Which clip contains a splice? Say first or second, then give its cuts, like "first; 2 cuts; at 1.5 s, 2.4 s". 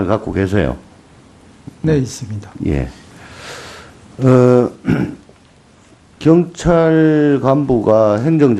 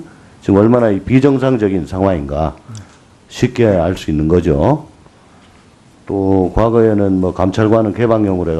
second; 1 cut; at 7.4 s